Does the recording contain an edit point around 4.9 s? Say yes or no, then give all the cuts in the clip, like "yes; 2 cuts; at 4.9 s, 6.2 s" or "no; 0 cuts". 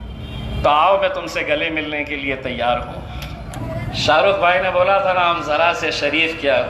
no; 1 cut; at 3.6 s